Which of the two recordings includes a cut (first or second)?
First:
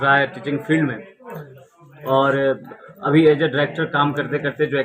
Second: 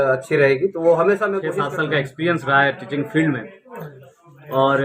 second